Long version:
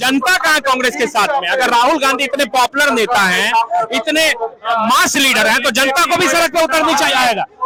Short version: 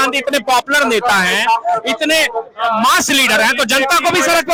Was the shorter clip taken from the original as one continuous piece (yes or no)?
yes